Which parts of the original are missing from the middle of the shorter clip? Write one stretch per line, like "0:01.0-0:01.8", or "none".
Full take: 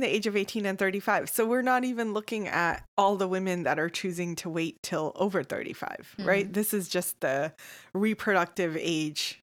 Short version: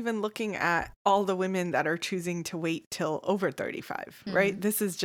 none